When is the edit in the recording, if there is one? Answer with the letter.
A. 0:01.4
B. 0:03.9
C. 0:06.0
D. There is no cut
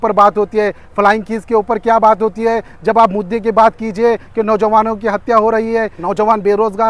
C